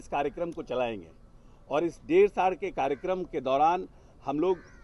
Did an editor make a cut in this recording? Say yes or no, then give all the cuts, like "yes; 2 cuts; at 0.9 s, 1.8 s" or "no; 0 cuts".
no; 0 cuts